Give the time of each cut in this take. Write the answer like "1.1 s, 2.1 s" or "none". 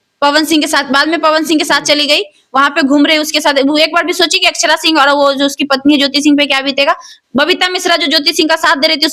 none